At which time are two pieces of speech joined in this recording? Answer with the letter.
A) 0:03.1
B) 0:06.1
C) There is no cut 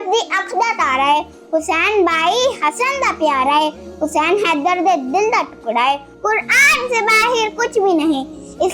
B